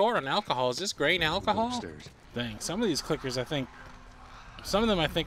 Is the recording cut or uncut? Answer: cut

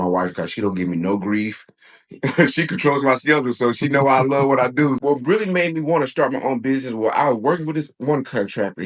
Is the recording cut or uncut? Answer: cut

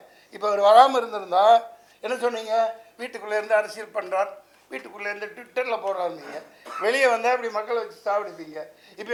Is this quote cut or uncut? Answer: uncut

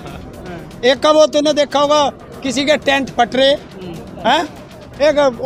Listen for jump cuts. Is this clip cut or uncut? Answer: uncut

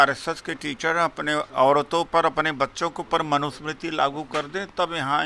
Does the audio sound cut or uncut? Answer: cut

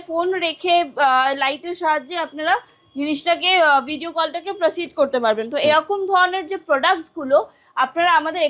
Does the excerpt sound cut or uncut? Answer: uncut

